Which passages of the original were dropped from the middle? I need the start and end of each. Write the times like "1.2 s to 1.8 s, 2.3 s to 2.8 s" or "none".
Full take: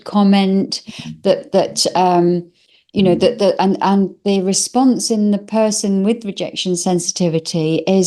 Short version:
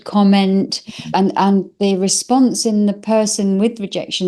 1.1 s to 3.6 s